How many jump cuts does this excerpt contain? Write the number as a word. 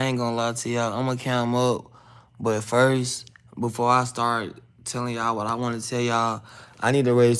zero